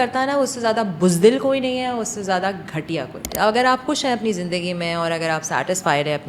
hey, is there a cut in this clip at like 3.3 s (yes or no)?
yes